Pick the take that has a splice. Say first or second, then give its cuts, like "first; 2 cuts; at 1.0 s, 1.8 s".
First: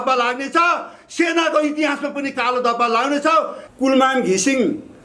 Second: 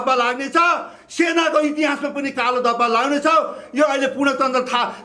first; 1 cut; at 3.6 s